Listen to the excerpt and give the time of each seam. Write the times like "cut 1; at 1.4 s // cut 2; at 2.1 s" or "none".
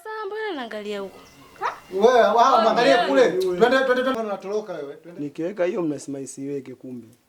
cut 1; at 4.1 s

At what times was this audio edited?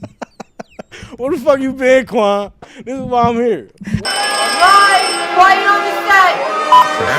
cut 1; at 4.0 s

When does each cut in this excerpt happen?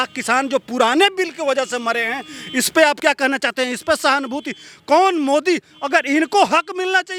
none

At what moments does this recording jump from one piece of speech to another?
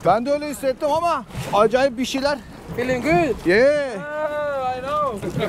cut 1; at 1.3 s

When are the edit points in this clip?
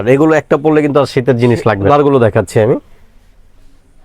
cut 1; at 1.9 s

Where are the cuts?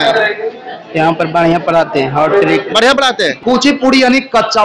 cut 1; at 3.4 s

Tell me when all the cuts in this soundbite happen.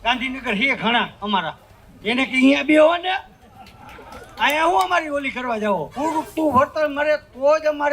cut 1; at 5.9 s

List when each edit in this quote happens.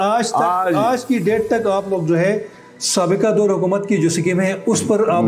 none

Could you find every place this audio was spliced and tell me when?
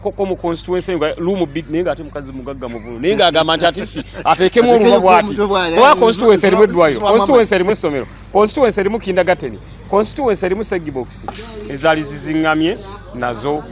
cut 1; at 11.5 s

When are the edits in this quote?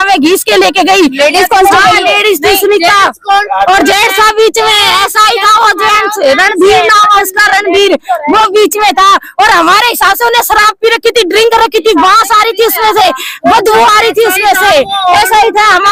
none

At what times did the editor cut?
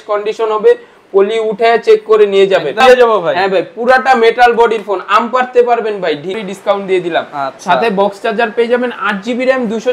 cut 1; at 2.8 s // cut 2; at 6.3 s

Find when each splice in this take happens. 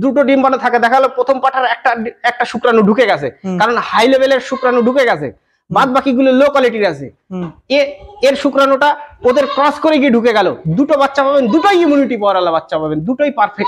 none

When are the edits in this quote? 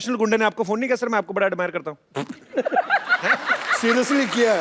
cut 1; at 3.7 s

